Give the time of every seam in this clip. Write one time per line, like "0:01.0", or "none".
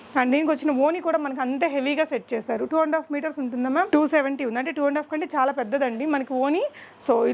none